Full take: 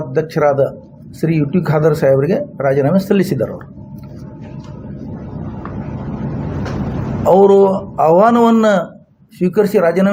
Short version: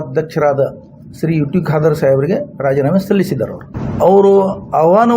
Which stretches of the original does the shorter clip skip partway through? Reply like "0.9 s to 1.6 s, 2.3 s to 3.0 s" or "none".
3.8 s to 7.0 s